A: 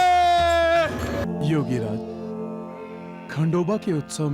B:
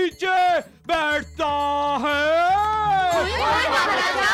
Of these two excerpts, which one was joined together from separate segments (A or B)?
A